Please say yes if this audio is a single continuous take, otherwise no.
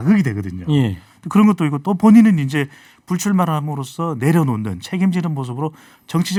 yes